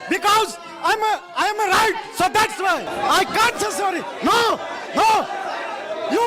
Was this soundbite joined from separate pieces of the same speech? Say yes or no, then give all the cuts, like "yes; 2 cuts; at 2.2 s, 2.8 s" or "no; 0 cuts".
yes; 1 cut; at 2.9 s